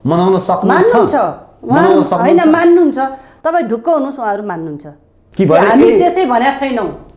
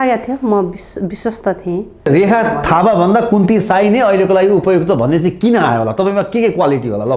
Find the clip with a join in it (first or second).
second